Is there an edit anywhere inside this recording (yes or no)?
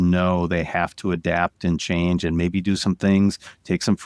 no